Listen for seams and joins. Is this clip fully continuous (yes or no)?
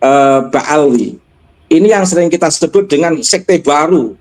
no